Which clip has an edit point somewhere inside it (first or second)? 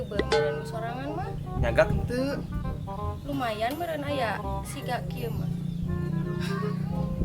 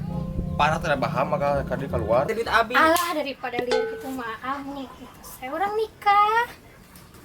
second